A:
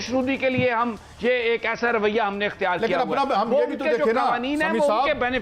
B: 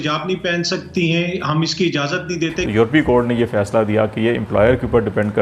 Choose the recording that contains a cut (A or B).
B